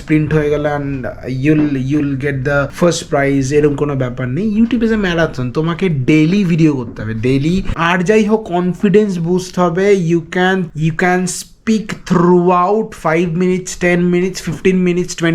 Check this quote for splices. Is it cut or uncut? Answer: cut